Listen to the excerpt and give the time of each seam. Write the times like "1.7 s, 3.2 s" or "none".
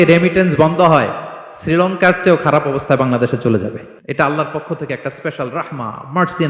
3.9 s